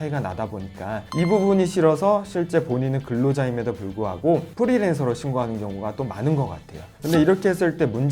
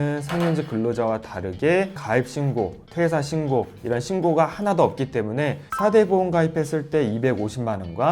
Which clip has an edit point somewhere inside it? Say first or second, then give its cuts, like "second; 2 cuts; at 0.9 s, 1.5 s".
second; 2 cuts; at 2.0 s, 5.6 s